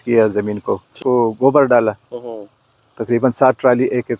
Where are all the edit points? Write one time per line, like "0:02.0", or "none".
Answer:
0:00.9